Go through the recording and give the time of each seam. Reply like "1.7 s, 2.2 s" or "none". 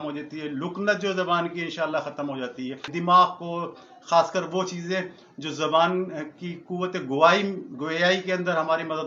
2.9 s